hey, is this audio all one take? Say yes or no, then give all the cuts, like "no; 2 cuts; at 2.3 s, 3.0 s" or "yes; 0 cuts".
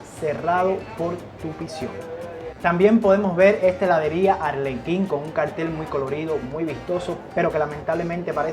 yes; 0 cuts